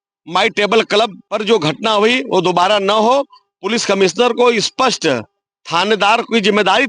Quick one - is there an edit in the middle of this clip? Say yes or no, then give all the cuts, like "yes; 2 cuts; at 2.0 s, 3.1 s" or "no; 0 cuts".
yes; 1 cut; at 1.2 s